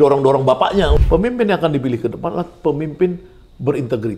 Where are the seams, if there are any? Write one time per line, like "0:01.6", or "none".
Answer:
0:01.0